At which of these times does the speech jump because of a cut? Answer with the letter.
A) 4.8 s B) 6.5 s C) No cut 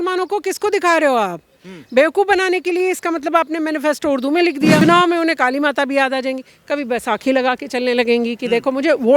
A